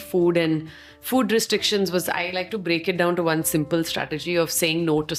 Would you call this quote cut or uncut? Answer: uncut